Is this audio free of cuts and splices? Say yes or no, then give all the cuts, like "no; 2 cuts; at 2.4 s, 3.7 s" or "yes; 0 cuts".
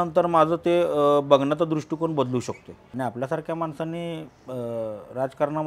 no; 1 cut; at 2.9 s